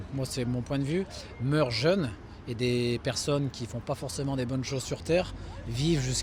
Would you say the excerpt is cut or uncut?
uncut